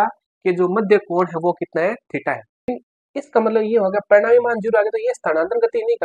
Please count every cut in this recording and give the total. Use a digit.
1